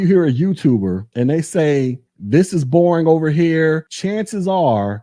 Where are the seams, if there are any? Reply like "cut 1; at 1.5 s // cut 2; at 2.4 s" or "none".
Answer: cut 1; at 1.1 s // cut 2; at 3.9 s